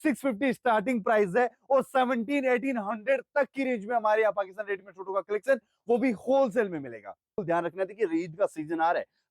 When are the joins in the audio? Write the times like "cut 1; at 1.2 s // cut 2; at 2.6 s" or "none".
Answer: cut 1; at 7.3 s